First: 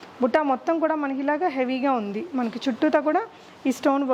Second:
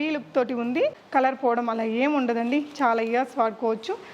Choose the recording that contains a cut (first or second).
second